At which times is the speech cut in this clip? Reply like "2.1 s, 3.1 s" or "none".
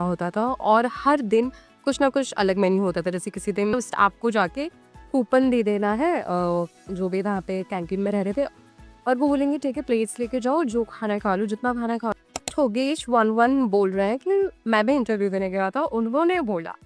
3.7 s, 12.1 s